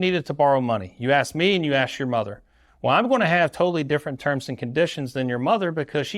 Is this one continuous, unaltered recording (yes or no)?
yes